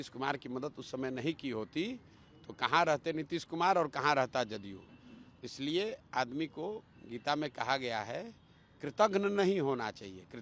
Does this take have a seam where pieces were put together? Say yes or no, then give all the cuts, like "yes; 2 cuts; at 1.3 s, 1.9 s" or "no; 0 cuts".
no; 0 cuts